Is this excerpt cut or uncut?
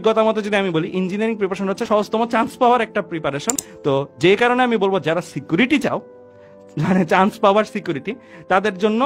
cut